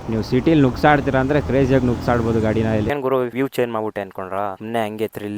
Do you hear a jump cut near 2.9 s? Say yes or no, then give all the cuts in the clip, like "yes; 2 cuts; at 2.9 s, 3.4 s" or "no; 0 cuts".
yes; 1 cut; at 2.9 s